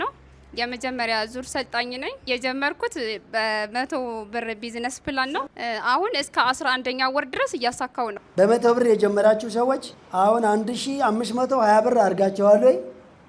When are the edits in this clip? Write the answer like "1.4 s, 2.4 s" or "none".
2.2 s, 8.2 s, 10.0 s

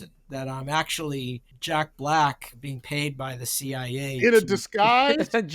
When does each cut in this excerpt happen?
1.5 s, 2.6 s

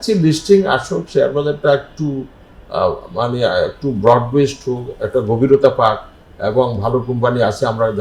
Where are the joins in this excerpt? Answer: none

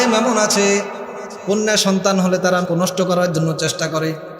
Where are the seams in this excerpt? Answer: 2.6 s

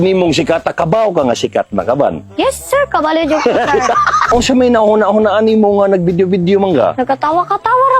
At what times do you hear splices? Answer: 4.3 s, 7.0 s

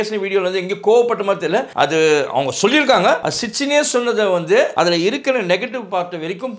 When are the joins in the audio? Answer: 1.7 s, 3.3 s, 4.7 s

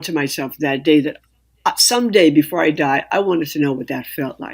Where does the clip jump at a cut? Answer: none

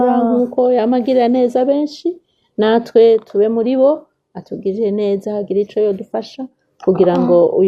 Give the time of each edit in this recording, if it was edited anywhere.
none

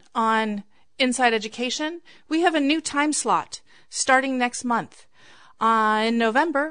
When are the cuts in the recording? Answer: none

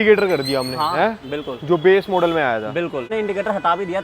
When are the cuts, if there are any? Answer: 3.1 s

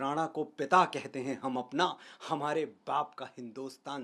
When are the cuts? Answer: none

